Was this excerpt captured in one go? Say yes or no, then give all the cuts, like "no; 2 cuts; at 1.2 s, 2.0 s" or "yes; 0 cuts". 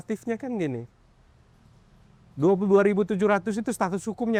yes; 0 cuts